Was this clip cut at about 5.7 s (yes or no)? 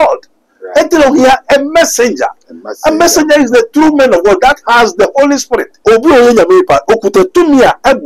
yes